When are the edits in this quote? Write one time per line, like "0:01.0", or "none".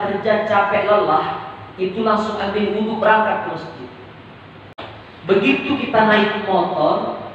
0:04.9